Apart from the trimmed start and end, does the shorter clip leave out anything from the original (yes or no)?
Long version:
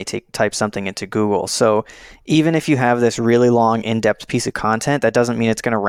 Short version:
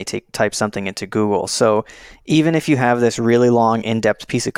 no